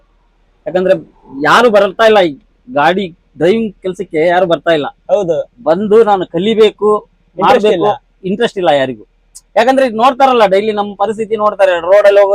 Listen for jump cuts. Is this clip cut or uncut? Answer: uncut